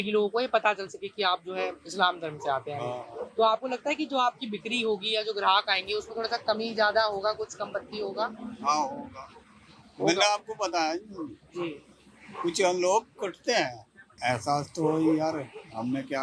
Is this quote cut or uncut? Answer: cut